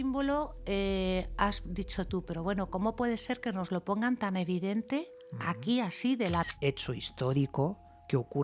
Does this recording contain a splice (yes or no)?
yes